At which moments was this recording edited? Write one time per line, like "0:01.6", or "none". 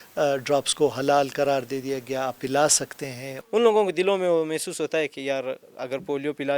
0:03.3

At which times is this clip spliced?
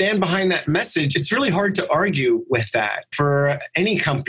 0:01.1
0:03.1

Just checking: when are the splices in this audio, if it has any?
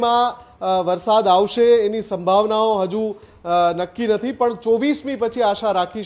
none

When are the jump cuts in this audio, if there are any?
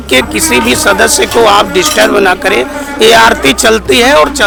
none

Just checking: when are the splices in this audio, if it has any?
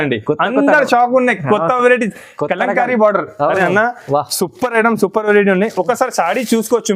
none

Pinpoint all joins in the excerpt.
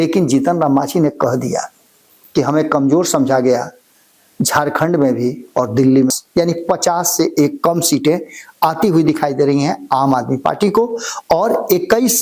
0:06.1

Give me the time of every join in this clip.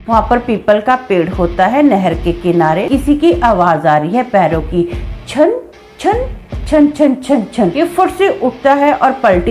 0:02.8
0:07.7

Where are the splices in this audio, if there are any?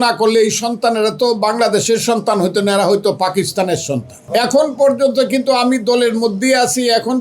0:04.1

